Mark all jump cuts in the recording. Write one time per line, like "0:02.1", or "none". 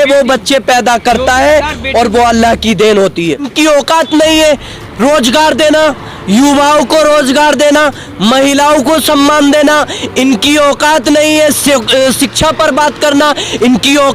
0:03.5

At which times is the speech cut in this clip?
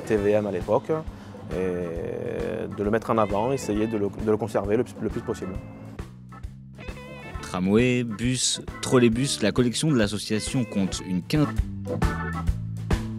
none

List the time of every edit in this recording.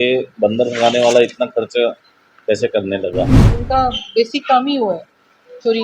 0:03.5

